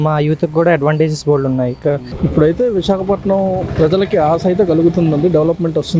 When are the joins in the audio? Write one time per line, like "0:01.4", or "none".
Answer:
0:02.1